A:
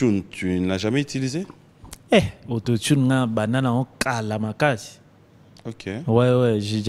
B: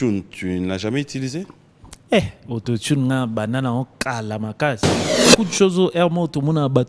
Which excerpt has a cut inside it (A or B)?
B